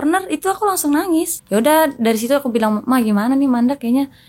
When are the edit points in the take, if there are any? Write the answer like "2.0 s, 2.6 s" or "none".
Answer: 1.4 s